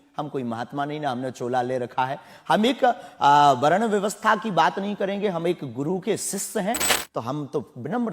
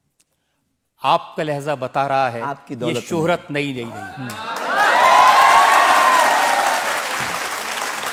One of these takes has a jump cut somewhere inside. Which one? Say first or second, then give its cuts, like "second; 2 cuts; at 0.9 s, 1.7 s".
first; 1 cut; at 6.9 s